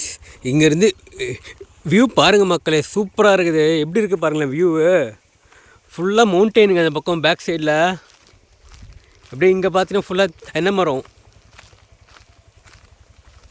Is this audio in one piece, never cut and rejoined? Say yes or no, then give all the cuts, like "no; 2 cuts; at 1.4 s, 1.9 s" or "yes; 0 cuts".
yes; 0 cuts